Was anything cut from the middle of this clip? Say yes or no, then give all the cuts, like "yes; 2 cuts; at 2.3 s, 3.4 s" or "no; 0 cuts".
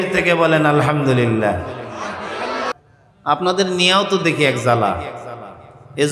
yes; 1 cut; at 2.7 s